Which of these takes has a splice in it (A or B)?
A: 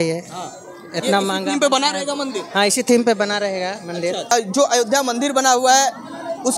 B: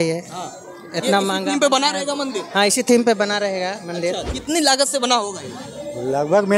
B